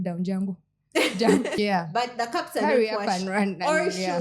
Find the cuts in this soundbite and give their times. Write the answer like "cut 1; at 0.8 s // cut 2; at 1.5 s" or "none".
cut 1; at 1.6 s